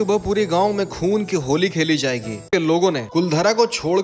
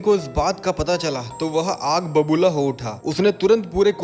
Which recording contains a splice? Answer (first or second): first